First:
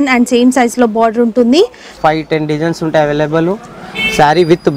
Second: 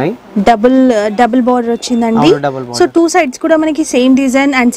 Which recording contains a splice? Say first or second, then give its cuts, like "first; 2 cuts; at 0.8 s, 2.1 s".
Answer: first; 1 cut; at 2.0 s